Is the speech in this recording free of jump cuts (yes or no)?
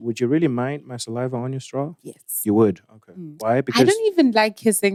yes